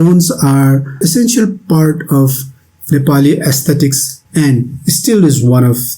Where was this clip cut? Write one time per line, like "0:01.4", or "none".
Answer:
0:04.2